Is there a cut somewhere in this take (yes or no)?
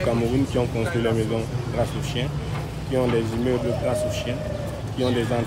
no